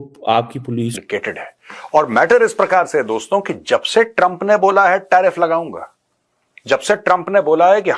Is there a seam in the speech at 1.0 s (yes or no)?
yes